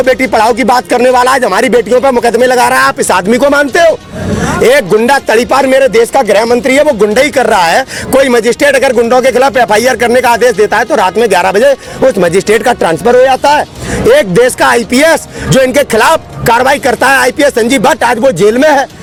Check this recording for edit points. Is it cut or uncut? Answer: uncut